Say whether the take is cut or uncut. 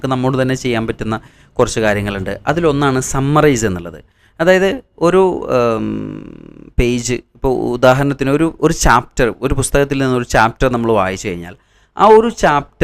uncut